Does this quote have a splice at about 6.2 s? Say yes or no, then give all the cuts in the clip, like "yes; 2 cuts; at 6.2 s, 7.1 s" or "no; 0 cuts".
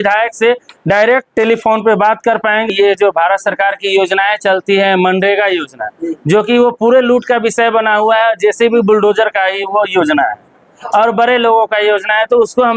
no; 1 cut; at 2.7 s